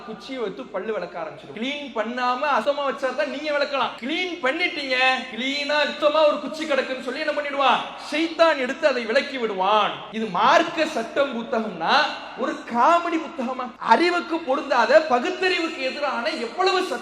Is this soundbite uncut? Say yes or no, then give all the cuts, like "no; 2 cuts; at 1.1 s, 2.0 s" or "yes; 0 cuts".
no; 6 cuts; at 1.4 s, 2.6 s, 4.0 s, 5.6 s, 10.0 s, 13.7 s